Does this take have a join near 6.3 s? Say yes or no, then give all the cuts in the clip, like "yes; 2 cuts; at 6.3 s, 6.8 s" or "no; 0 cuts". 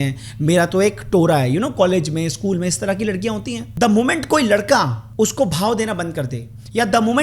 no; 2 cuts; at 3.6 s, 5.0 s